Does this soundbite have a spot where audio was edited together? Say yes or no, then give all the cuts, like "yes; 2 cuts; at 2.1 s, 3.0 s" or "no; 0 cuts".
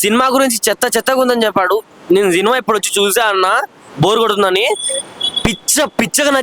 no; 0 cuts